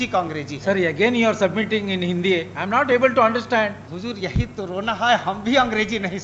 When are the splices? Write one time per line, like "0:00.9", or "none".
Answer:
0:03.9